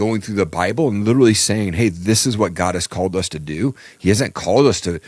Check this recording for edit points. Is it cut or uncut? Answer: uncut